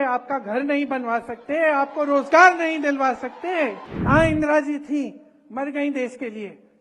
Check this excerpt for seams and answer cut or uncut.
cut